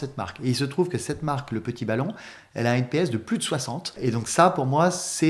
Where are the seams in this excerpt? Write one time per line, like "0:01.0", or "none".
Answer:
0:03.9